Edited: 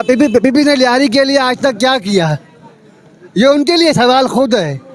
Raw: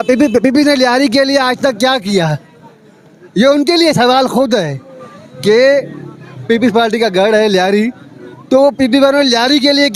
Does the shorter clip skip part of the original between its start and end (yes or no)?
no